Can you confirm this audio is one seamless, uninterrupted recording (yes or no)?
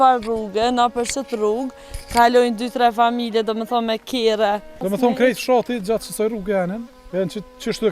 no